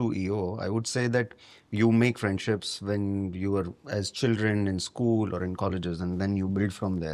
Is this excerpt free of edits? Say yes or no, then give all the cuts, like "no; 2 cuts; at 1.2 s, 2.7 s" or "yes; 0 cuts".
yes; 0 cuts